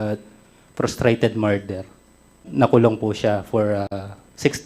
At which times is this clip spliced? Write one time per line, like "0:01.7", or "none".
0:02.5